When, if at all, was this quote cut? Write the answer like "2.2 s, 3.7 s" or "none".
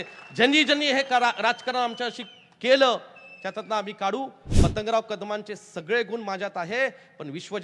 4.4 s